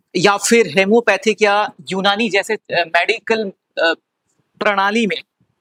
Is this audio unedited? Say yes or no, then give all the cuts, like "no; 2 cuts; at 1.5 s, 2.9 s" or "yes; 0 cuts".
yes; 0 cuts